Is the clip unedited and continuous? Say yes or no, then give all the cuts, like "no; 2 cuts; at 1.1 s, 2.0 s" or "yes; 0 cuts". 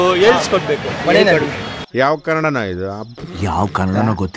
yes; 0 cuts